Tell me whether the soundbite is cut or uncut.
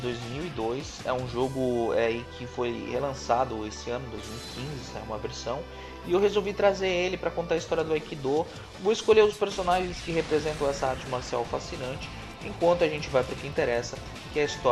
uncut